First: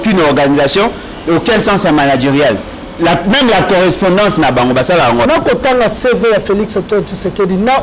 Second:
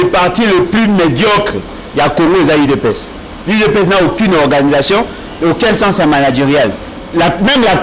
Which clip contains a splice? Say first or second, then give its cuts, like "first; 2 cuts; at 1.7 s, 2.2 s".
first; 1 cut; at 5.3 s